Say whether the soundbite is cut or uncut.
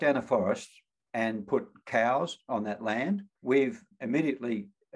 uncut